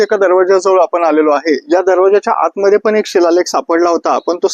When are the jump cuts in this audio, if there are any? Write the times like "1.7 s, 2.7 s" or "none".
none